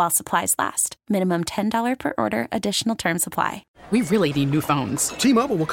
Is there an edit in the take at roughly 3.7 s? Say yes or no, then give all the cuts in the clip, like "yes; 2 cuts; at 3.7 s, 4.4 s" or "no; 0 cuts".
yes; 1 cut; at 3.7 s